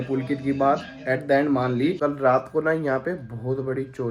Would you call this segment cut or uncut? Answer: cut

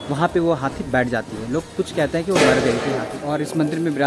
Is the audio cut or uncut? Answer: cut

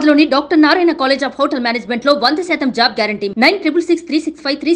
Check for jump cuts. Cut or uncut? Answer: uncut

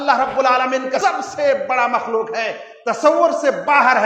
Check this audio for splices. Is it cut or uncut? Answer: cut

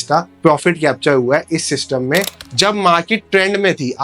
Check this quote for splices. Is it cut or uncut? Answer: cut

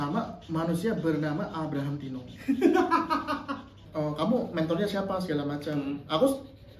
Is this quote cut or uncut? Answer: cut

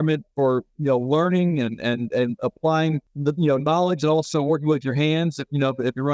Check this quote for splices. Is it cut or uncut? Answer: cut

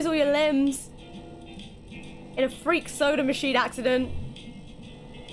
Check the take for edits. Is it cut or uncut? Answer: uncut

